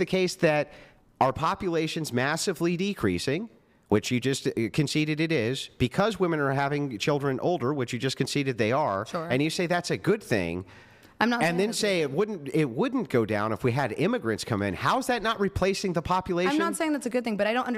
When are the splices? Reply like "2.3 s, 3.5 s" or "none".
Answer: none

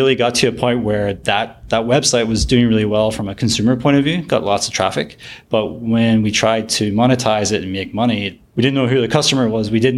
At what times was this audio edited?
none

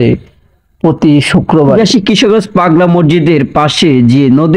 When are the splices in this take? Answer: 1.7 s

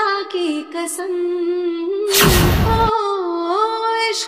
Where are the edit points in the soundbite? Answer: 2.5 s

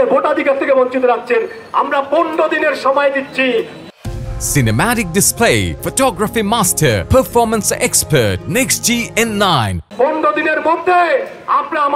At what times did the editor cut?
none

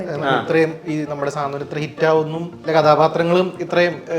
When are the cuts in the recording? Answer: 2.7 s

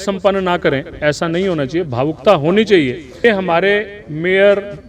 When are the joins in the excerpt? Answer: 3.2 s

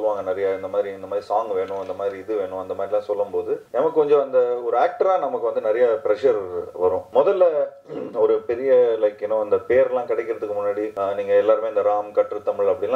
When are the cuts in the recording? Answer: 3.6 s, 7.0 s, 10.9 s

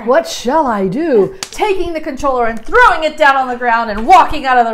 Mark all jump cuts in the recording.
1.4 s

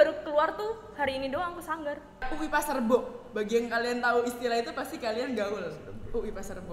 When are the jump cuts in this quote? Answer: 2.3 s

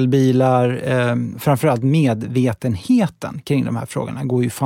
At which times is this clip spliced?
1.3 s

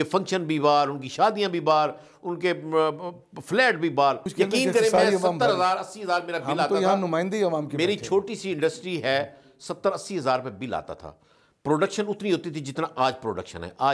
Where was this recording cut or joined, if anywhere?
4.3 s

